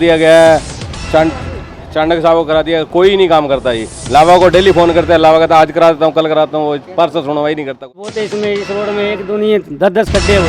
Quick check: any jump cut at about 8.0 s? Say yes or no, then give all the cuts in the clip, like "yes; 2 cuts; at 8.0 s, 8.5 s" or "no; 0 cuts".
yes; 1 cut; at 8.0 s